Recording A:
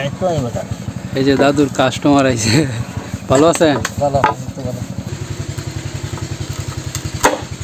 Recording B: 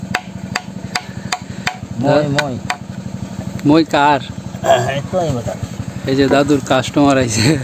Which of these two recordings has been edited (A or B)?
A